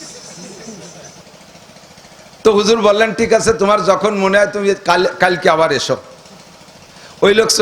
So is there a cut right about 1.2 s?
yes; 1 cut; at 1.2 s

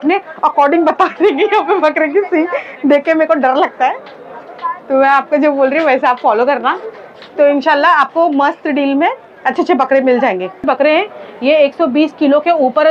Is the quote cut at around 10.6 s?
yes; 1 cut; at 10.6 s

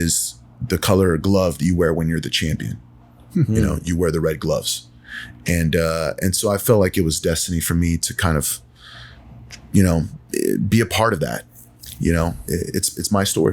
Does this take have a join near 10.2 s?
yes; 2 cuts; at 10.2 s, 11.4 s

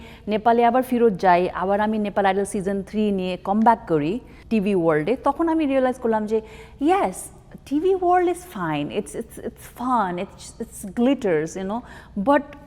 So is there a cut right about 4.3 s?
yes; 1 cut; at 4.3 s

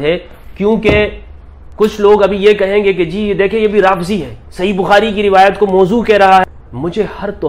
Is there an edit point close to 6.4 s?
yes; 1 cut; at 6.4 s

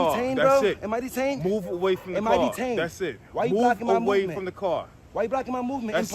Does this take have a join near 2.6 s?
no; 0 cuts

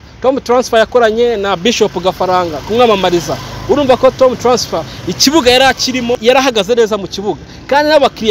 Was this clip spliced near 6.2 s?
yes; 1 cut; at 6.2 s

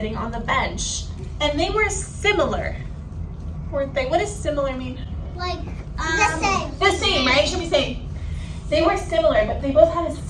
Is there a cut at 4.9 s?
no; 0 cuts

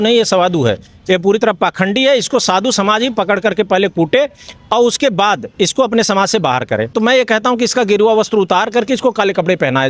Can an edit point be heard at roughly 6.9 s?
yes; 1 cut; at 6.9 s

